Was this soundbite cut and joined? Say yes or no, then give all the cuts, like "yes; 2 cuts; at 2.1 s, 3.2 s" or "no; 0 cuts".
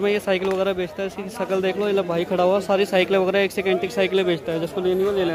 no; 0 cuts